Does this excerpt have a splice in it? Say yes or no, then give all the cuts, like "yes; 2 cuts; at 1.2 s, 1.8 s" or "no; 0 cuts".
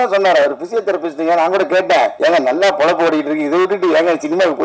yes; 1 cut; at 2.1 s